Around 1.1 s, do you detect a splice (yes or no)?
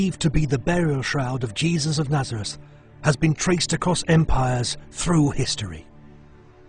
yes